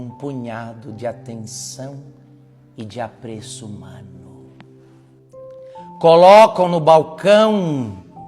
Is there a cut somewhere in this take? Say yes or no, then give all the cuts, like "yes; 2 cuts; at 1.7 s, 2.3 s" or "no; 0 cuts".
yes; 2 cuts; at 4.1 s, 6.0 s